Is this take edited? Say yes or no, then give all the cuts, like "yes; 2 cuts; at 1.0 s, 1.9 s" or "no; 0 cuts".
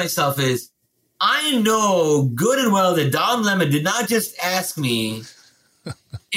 no; 0 cuts